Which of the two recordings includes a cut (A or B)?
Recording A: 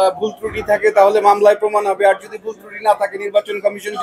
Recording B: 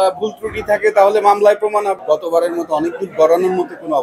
B